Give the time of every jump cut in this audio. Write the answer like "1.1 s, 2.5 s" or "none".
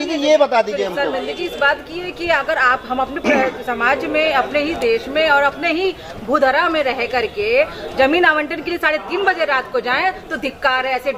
none